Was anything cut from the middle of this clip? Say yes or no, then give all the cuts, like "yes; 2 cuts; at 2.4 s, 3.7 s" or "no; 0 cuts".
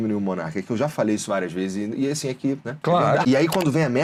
no; 0 cuts